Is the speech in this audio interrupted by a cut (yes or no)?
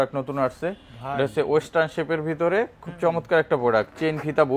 no